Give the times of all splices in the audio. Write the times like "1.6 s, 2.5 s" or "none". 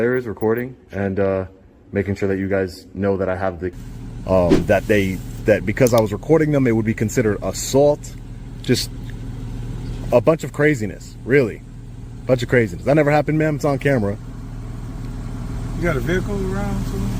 3.8 s